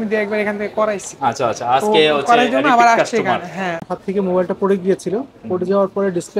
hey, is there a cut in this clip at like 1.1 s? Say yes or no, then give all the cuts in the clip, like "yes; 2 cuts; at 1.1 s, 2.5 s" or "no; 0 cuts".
no; 1 cut; at 3.9 s